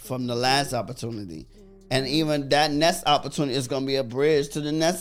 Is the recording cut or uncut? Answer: uncut